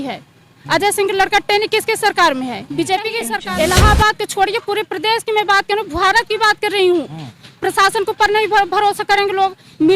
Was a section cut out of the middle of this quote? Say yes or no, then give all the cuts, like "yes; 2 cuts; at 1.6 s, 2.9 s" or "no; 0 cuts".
yes; 1 cut; at 3.3 s